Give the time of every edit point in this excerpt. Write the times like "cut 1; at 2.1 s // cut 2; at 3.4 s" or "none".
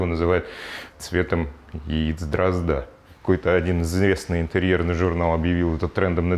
cut 1; at 0.9 s // cut 2; at 3.1 s